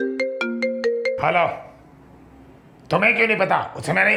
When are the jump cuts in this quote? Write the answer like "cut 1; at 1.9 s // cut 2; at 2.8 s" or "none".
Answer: none